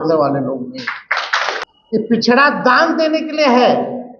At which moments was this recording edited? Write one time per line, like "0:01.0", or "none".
0:01.6